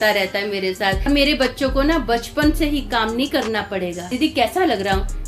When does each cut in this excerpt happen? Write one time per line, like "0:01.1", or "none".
0:01.1
0:04.1